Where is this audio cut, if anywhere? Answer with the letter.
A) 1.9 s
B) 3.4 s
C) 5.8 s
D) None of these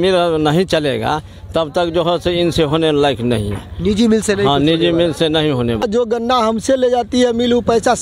C